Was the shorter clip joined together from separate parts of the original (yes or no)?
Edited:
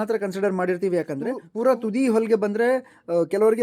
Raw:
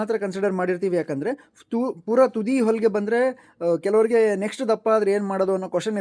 yes